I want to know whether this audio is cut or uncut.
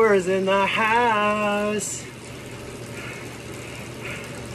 uncut